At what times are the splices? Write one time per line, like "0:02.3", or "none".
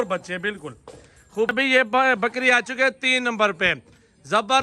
0:01.5

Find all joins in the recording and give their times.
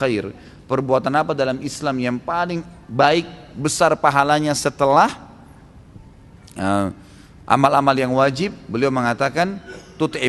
none

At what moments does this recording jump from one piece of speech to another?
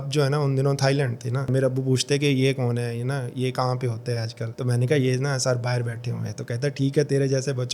0:01.5

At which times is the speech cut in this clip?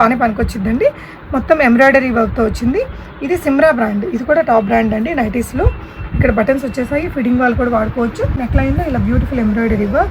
0:08.3

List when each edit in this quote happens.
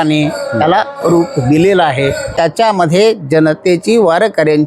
0:02.3

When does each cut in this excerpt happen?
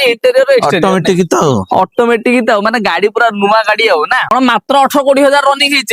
0:04.3

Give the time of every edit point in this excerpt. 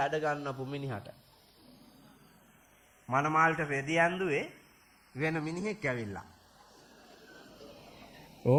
none

